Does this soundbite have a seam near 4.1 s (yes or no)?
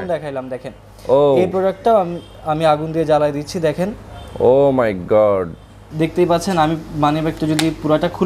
no